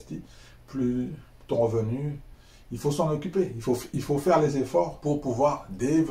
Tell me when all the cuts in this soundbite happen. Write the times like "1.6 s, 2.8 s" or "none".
5.0 s